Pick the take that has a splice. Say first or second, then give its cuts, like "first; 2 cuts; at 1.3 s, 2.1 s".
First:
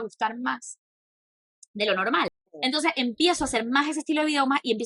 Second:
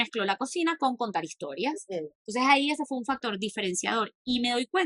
first; 1 cut; at 2.3 s